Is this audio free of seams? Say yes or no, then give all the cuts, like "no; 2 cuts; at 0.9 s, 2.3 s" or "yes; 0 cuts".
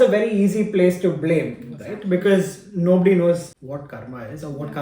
no; 1 cut; at 3.5 s